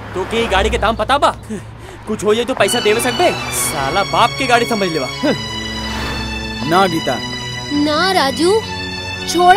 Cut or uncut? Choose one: uncut